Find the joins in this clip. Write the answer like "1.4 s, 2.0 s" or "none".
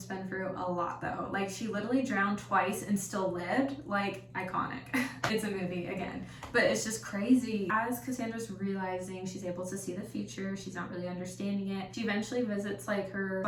none